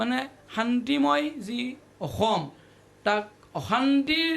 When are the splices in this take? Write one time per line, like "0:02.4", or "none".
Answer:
none